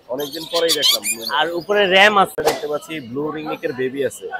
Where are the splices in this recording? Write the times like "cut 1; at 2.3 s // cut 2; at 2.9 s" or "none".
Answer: cut 1; at 2.4 s